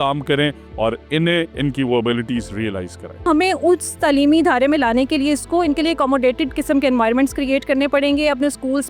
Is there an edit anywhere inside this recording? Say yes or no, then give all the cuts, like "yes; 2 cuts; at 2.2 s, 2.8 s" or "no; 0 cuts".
yes; 1 cut; at 3.3 s